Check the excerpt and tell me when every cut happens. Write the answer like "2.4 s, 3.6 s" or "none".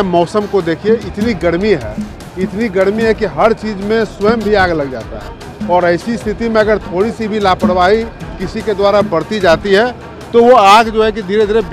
none

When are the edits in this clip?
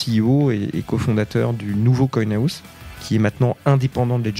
2.9 s

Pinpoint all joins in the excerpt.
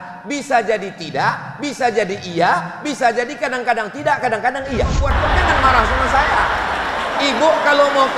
5.1 s

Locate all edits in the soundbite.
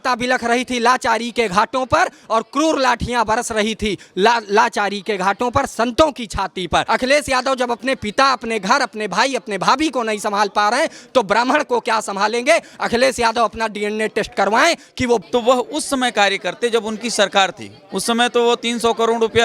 6.8 s, 15.2 s

